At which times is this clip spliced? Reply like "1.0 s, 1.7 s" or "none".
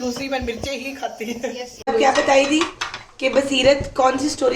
1.9 s

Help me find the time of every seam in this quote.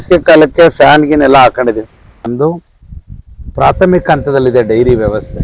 2.3 s

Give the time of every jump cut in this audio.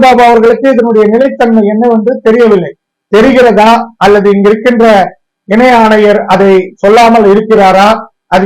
none

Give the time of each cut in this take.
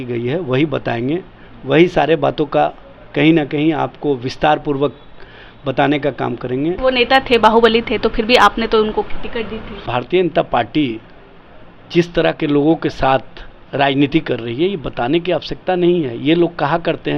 6.8 s, 9.8 s

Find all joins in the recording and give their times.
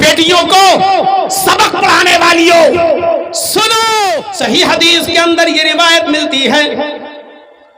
4.3 s

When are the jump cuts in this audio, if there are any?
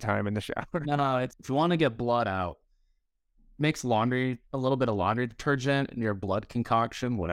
1.4 s

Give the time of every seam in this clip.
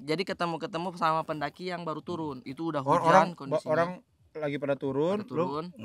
none

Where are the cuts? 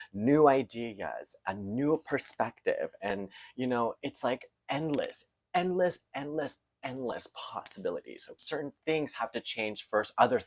8.4 s

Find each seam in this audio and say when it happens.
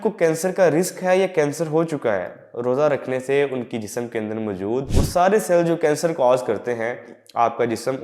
4.9 s

